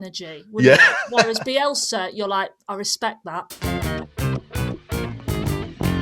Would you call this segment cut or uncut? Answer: cut